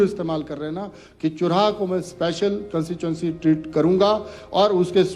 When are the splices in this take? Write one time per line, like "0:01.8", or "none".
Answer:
none

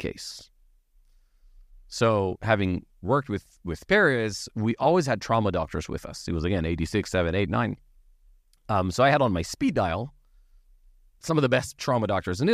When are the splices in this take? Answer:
none

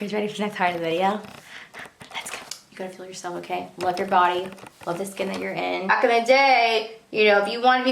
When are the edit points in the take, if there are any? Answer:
0:02.6
0:05.9

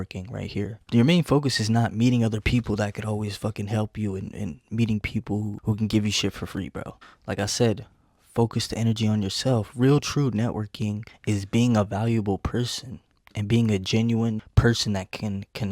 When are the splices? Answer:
0:06.9
0:11.1

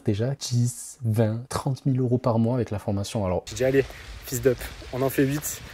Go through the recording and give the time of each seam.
0:03.4

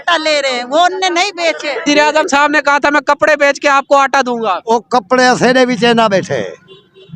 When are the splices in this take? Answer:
0:01.9

